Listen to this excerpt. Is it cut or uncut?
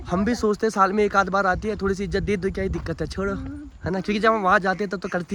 uncut